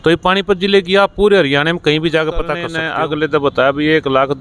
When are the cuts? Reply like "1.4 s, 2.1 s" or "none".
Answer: 2.7 s